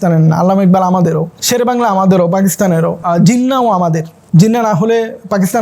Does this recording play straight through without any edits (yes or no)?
no